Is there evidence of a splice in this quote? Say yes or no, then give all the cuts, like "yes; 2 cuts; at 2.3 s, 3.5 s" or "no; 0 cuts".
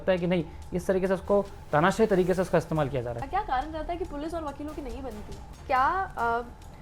yes; 2 cuts; at 3.2 s, 5.6 s